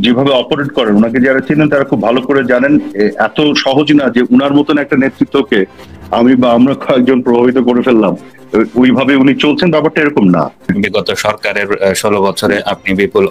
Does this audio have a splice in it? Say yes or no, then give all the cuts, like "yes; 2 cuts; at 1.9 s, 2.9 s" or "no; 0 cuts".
yes; 1 cut; at 10.6 s